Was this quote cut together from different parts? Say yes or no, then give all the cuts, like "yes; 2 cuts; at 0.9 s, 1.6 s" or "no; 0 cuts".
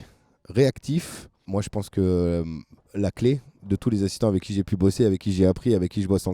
yes; 1 cut; at 1.4 s